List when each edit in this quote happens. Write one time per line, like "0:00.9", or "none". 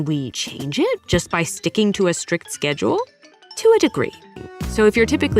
0:00.9
0:04.3